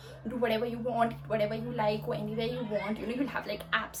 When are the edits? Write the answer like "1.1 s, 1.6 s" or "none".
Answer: none